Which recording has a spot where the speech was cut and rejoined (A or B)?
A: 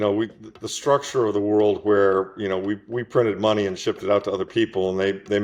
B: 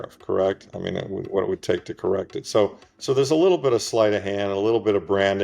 B